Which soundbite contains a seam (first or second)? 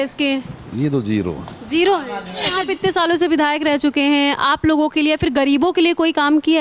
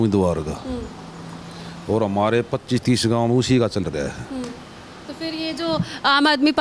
first